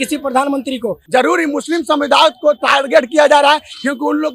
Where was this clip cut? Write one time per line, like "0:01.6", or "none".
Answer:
0:01.0